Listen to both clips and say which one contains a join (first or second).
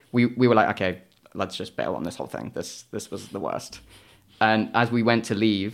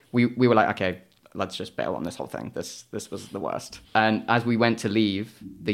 second